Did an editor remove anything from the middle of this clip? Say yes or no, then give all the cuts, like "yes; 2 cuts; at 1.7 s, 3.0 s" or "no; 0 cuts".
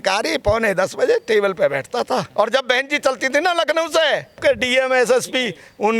yes; 2 cuts; at 2.3 s, 4.4 s